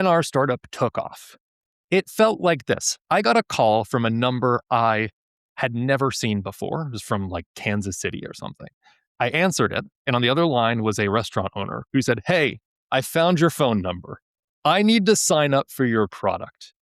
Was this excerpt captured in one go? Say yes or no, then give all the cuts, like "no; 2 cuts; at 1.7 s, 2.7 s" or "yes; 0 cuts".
yes; 0 cuts